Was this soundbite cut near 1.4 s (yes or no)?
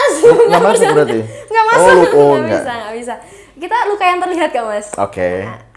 no